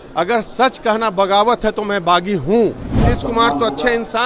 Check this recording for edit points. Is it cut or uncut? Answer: cut